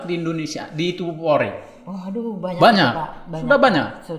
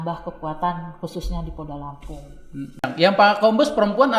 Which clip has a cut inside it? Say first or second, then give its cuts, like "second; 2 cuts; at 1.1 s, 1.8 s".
second; 1 cut; at 2.9 s